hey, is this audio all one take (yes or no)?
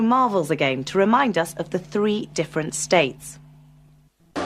yes